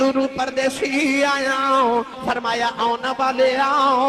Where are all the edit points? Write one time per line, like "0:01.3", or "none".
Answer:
0:02.1